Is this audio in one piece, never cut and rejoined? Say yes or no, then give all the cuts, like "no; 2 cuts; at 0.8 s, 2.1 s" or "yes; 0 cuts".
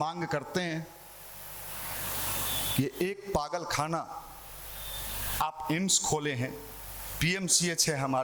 yes; 0 cuts